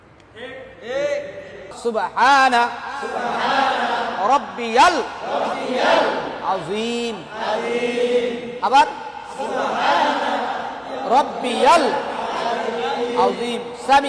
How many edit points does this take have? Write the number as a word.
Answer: one